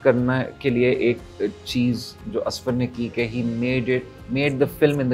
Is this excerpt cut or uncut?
uncut